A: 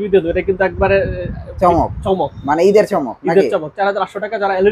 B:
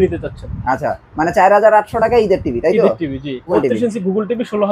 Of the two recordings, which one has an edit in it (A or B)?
B